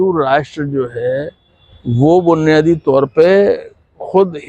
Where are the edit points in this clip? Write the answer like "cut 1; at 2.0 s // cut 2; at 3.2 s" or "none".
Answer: none